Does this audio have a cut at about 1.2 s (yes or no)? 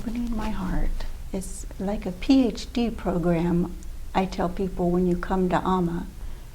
yes